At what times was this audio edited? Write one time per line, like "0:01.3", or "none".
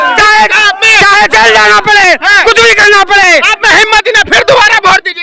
none